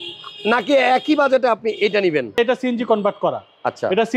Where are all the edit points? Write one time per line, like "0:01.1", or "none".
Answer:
0:02.3